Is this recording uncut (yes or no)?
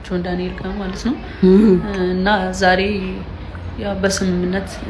yes